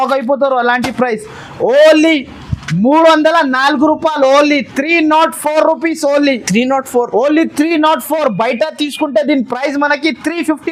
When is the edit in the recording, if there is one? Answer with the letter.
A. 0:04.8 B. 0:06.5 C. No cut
C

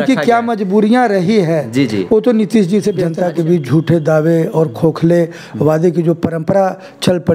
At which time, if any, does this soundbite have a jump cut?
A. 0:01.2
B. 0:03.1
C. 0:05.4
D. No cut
B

